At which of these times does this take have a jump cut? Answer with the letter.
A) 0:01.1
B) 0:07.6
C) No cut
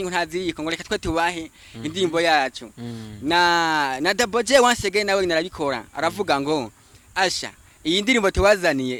C